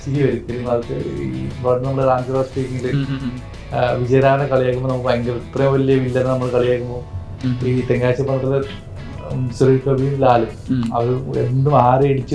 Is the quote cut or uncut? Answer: uncut